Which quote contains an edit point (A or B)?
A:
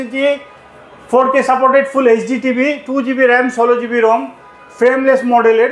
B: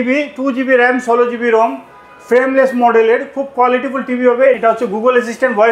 B